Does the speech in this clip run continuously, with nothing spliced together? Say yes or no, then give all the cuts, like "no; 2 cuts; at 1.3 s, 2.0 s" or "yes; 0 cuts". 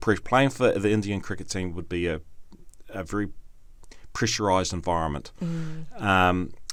yes; 0 cuts